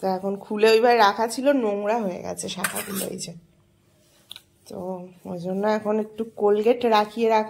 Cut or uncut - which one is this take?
uncut